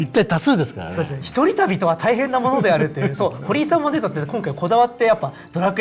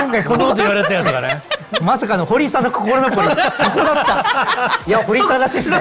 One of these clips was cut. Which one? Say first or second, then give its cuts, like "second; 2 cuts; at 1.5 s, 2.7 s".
first; 1 cut; at 1.2 s